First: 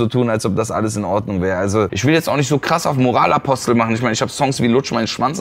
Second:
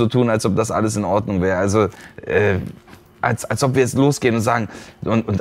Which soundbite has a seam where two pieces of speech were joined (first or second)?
first